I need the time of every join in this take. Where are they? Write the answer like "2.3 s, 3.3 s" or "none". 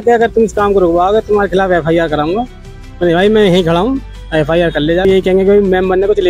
5.0 s